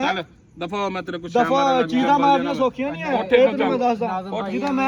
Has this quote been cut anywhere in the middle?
no; 0 cuts

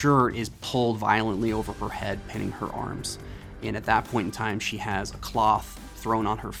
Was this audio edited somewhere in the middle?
no; 0 cuts

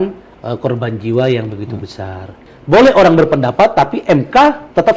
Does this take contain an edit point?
yes; 1 cut; at 2.5 s

